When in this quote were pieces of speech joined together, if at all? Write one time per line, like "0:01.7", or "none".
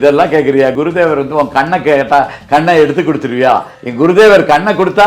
0:00.7
0:03.8